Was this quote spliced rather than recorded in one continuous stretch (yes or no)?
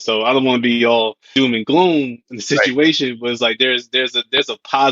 yes